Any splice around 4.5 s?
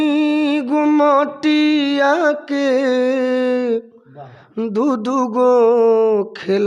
no; 0 cuts

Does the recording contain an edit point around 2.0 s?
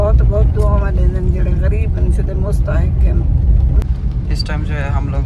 no; 1 cut; at 3.8 s

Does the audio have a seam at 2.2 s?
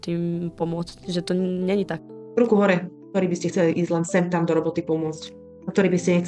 yes; 1 cut; at 2.2 s

